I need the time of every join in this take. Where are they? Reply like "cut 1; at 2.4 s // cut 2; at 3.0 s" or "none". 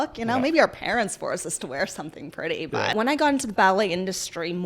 cut 1; at 2.9 s